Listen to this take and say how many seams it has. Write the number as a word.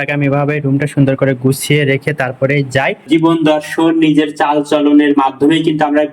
one